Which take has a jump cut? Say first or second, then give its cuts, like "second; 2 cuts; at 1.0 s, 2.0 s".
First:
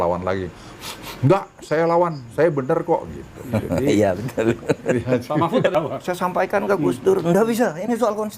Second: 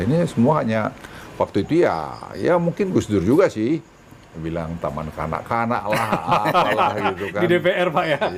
first; 1 cut; at 5.7 s